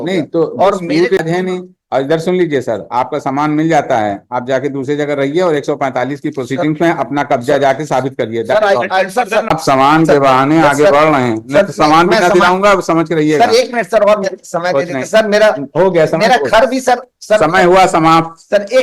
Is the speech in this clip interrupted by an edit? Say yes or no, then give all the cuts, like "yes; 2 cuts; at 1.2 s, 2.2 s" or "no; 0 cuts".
yes; 2 cuts; at 1.2 s, 9.6 s